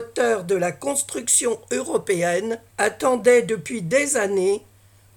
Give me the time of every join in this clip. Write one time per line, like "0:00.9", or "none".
0:02.7